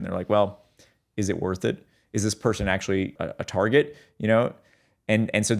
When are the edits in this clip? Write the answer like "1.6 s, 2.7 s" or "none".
3.1 s